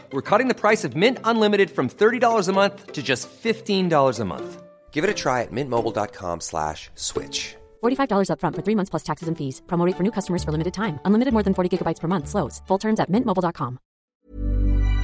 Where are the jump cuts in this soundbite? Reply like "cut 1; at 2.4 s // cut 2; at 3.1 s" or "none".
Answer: cut 1; at 14.1 s